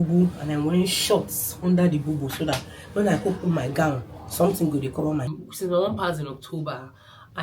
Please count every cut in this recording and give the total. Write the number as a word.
one